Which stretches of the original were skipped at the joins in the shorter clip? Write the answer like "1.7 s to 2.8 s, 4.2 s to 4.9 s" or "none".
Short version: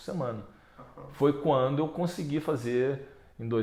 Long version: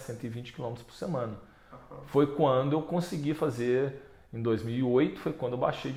none